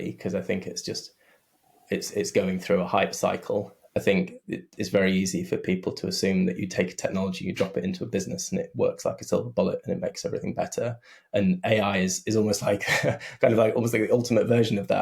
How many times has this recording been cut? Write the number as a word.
one